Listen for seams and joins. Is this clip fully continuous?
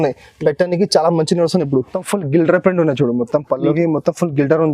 no; 1 cut; at 2.0 s

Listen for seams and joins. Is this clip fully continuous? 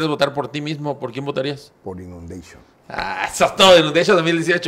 yes; 0 cuts

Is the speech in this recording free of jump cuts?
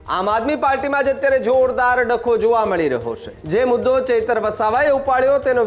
no; 1 cut; at 3.3 s

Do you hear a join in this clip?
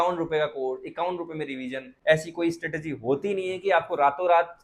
yes; 1 cut; at 1.9 s

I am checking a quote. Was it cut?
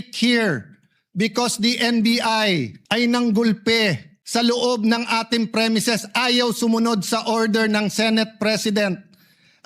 yes; 2 cuts; at 2.8 s, 4.1 s

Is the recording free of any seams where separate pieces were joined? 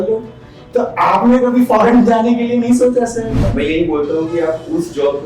no; 1 cut; at 3.4 s

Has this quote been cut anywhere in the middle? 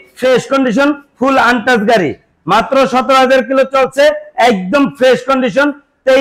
no; 0 cuts

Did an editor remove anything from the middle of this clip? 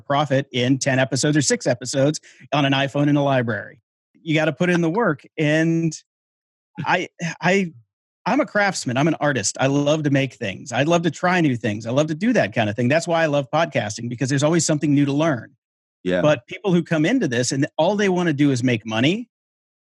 yes; 1 cut; at 3.9 s

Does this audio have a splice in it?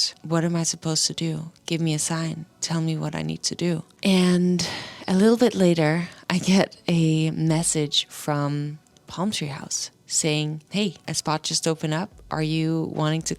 yes; 1 cut; at 3.9 s

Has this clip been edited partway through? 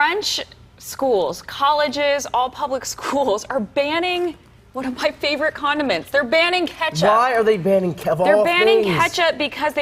no; 0 cuts

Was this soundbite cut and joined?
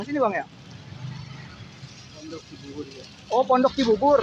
no; 0 cuts

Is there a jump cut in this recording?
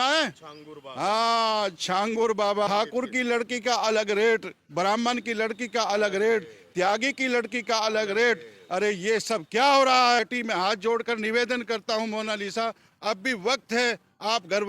yes; 2 cuts; at 2.7 s, 10.2 s

